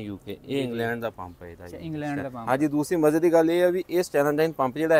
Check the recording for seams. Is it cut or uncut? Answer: uncut